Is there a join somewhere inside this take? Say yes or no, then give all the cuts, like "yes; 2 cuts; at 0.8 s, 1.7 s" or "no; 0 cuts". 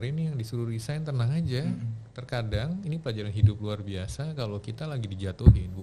no; 0 cuts